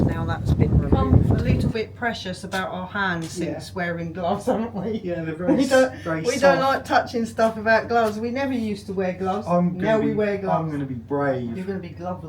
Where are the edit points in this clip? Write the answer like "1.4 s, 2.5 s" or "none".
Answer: 1.7 s